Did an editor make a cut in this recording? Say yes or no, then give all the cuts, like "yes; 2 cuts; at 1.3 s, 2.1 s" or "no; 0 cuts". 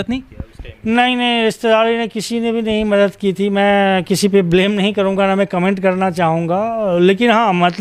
no; 0 cuts